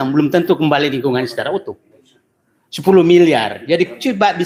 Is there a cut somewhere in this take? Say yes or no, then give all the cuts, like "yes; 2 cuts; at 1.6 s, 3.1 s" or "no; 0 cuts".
no; 0 cuts